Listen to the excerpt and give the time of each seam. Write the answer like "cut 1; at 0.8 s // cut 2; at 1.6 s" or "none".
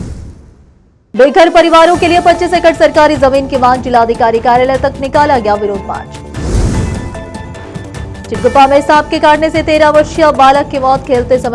cut 1; at 1.0 s